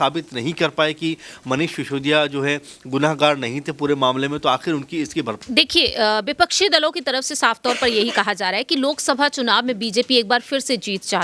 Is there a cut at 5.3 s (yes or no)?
yes